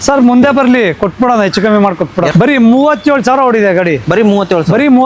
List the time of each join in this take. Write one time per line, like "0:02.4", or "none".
0:02.3

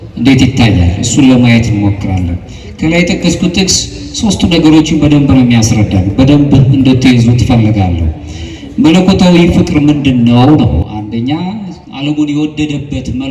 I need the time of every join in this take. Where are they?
none

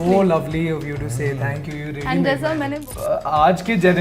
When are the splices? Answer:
0:02.8

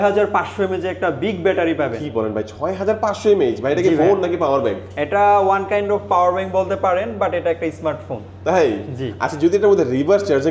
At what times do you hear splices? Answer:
none

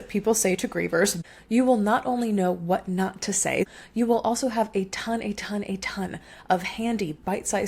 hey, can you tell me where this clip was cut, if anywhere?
0:01.2
0:03.7

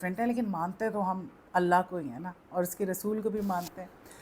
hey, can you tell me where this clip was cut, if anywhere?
none

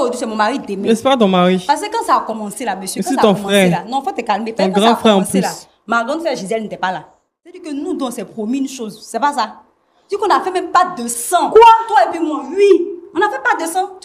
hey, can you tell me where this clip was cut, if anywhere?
0:07.6

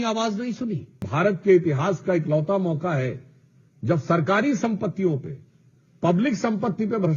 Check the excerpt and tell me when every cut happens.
0:01.1

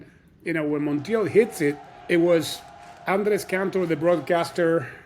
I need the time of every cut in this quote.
0:01.9

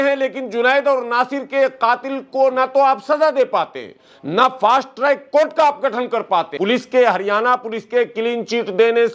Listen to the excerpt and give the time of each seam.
0:06.5

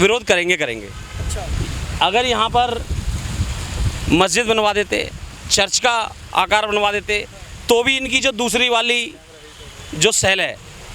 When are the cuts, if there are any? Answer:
none

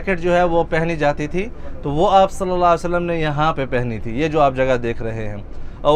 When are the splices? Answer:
none

